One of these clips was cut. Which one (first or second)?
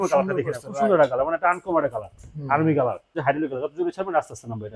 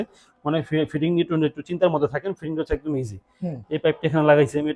first